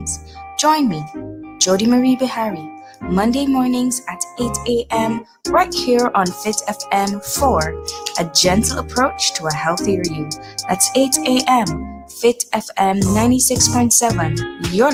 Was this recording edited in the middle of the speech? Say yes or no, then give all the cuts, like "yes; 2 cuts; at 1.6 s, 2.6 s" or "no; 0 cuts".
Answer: no; 0 cuts